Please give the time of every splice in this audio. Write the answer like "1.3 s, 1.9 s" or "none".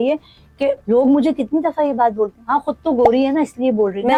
none